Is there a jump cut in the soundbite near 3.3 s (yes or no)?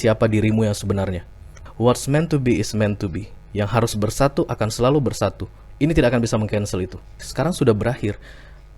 no